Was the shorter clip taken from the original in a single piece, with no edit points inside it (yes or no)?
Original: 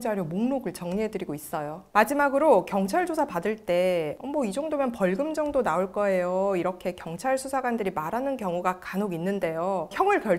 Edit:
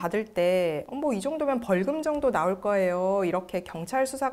yes